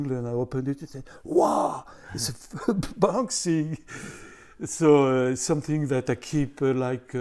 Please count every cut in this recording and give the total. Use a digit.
0